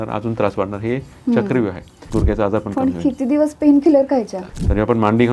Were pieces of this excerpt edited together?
yes; 2 cuts; at 2.0 s, 4.4 s

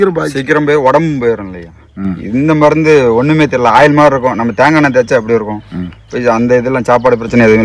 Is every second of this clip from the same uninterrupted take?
yes; 0 cuts

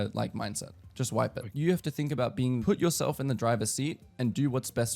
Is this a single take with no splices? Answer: no; 2 cuts; at 1.4 s, 2.6 s

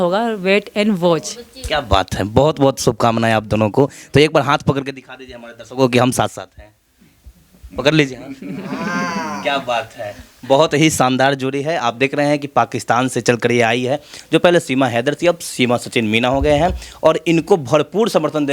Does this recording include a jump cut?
no; 0 cuts

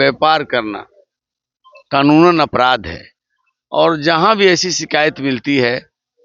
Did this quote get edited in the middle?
no; 0 cuts

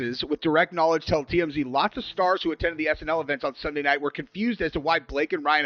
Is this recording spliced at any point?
no; 0 cuts

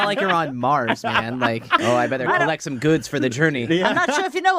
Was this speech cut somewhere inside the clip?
yes; 1 cut; at 1.8 s

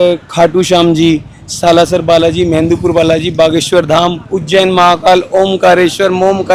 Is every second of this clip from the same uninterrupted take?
yes; 0 cuts

